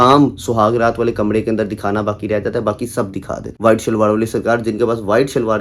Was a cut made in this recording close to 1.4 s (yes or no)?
no